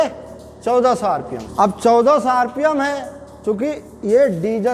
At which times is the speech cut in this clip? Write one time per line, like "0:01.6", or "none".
0:01.4